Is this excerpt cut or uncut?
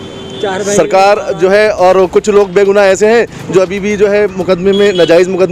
uncut